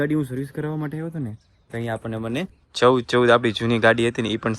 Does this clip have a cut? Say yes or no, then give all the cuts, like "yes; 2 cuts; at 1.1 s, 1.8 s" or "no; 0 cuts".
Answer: yes; 1 cut; at 2.6 s